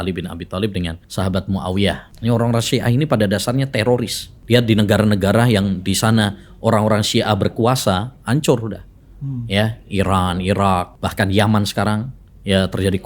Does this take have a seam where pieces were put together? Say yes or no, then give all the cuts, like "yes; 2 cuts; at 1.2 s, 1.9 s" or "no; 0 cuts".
yes; 4 cuts; at 1.0 s, 2.1 s, 4.3 s, 11.0 s